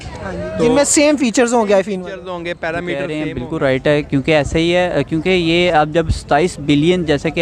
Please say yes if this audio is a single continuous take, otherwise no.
no